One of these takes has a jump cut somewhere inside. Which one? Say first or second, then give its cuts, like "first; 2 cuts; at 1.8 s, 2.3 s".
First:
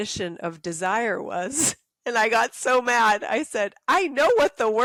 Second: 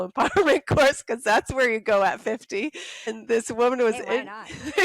second; 1 cut; at 3.2 s